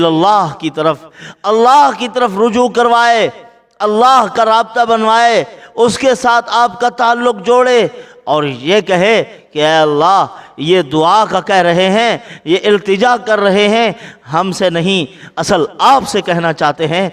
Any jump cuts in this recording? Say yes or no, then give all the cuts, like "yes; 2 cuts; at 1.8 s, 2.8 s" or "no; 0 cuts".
no; 0 cuts